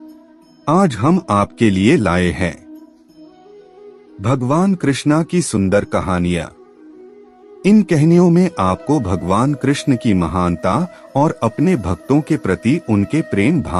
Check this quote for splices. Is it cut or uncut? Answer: uncut